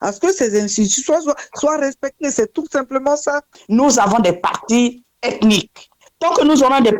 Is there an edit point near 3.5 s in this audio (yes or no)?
yes